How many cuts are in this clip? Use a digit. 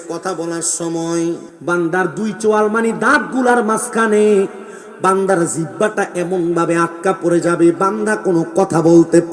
1